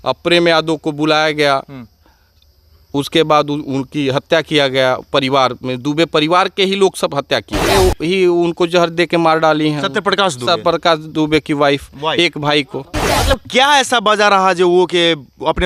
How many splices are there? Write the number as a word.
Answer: two